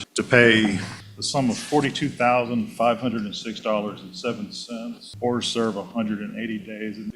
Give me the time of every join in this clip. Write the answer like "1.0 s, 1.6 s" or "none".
5.0 s